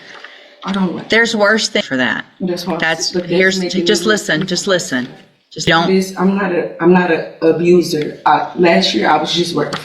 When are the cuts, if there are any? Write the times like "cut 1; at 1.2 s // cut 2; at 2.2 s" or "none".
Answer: cut 1; at 1.8 s // cut 2; at 5.7 s